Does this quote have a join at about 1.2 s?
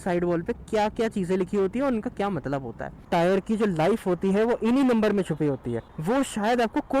no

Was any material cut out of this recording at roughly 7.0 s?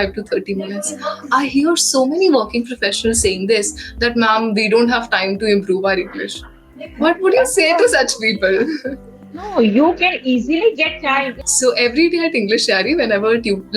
no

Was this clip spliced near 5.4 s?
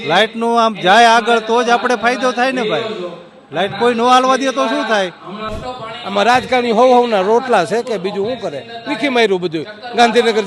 yes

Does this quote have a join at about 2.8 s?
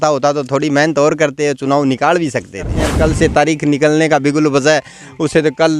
yes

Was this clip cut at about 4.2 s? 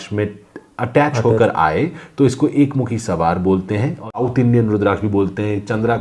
yes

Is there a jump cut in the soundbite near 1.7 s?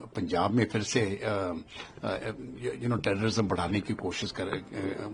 no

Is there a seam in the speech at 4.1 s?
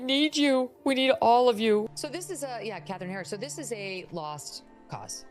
no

